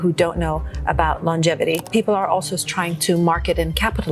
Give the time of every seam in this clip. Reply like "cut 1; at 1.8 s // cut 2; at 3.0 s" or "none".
cut 1; at 1.9 s

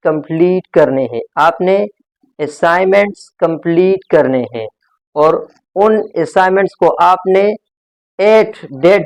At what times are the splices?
none

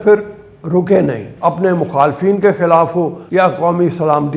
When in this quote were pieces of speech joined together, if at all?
cut 1; at 1.3 s // cut 2; at 3.2 s

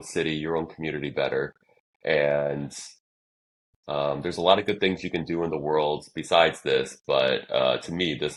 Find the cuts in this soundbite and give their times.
none

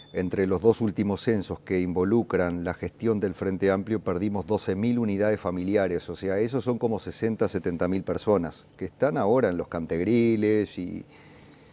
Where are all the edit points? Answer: none

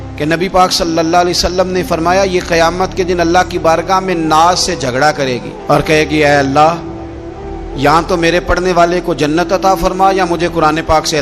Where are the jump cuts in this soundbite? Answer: none

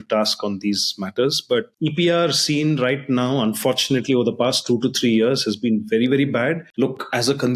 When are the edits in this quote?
cut 1; at 1.7 s // cut 2; at 6.7 s

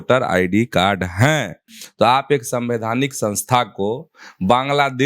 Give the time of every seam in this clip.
cut 1; at 1.5 s

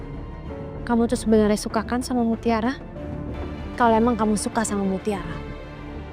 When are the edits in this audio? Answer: cut 1; at 3.3 s

